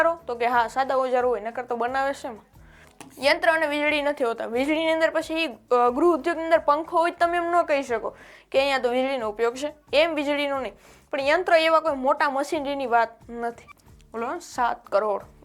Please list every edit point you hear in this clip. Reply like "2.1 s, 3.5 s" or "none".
2.6 s, 9.9 s, 13.7 s